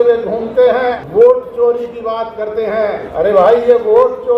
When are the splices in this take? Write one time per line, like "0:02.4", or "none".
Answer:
0:01.0
0:03.1